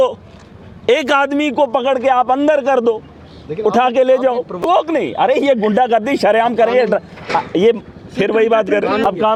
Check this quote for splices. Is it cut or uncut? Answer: uncut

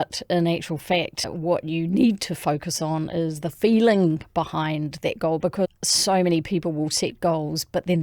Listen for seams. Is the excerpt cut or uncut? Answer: cut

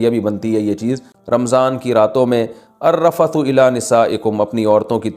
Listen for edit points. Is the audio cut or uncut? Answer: cut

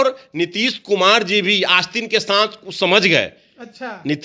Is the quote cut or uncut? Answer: uncut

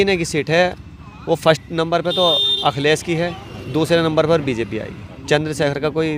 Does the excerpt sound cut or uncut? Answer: uncut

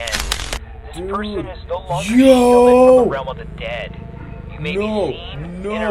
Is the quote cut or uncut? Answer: uncut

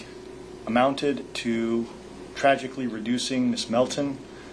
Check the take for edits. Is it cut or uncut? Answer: uncut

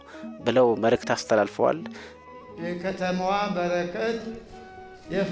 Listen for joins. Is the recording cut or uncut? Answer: cut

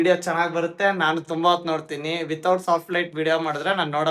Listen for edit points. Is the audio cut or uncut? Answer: uncut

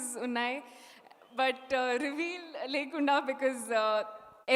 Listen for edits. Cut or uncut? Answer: uncut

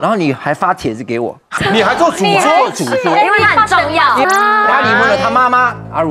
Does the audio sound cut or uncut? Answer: cut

